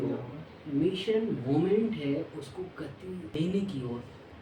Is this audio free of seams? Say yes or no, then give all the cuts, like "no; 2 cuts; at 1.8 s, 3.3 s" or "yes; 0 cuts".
no; 1 cut; at 3.2 s